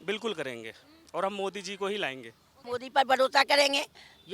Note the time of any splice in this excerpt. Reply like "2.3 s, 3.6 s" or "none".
2.5 s